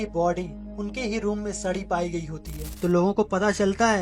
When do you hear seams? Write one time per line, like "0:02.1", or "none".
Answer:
0:02.7